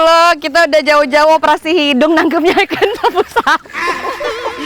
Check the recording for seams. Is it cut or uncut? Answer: uncut